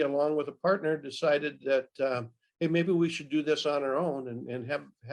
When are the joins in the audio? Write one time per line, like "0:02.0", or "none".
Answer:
none